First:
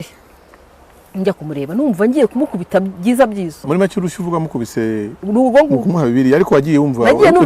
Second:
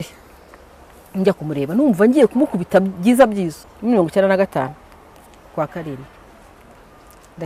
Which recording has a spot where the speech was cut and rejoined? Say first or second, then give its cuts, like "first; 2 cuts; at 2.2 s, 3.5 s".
first; 1 cut; at 3.5 s